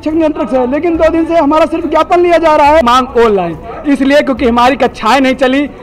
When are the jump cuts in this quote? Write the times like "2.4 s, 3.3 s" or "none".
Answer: 2.8 s